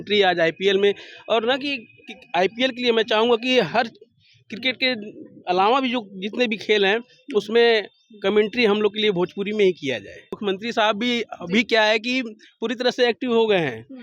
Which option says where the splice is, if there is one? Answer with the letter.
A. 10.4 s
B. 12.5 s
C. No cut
A